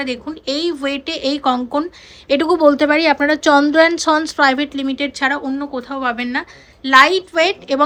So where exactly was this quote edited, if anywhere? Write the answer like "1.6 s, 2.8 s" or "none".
none

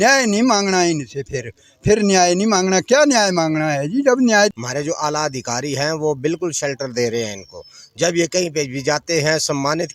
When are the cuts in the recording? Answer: 4.6 s

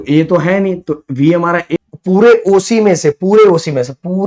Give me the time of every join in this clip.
1.7 s

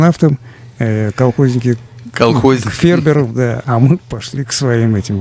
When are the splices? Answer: 3.6 s

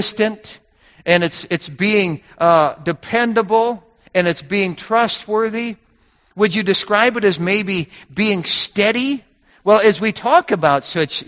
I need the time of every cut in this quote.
none

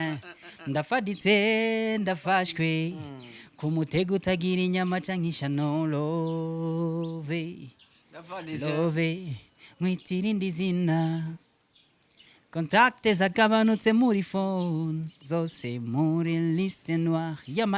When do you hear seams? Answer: none

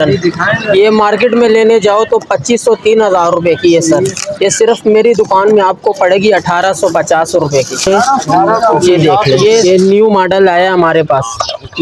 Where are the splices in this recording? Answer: 9.6 s

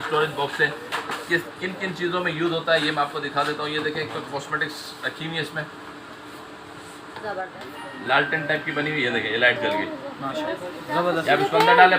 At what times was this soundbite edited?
7.5 s

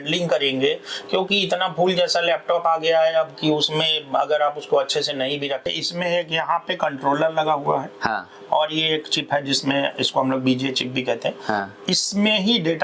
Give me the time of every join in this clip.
5.7 s

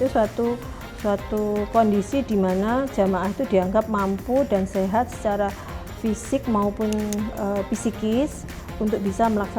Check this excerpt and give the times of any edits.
none

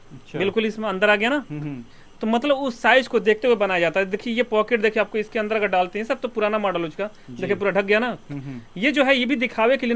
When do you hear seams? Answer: none

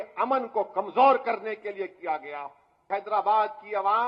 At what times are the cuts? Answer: 2.8 s

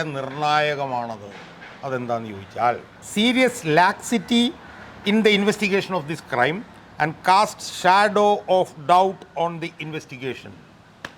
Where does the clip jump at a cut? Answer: 3.0 s

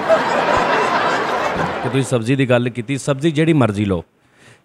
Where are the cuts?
1.8 s

